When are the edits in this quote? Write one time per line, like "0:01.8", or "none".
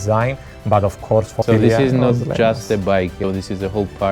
0:01.4